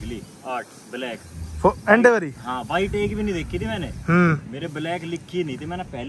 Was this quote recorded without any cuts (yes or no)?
yes